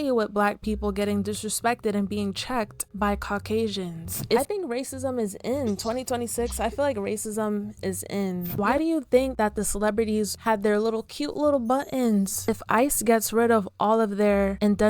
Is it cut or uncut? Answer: cut